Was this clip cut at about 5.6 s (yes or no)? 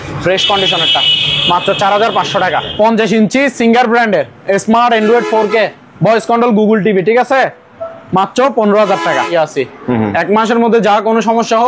no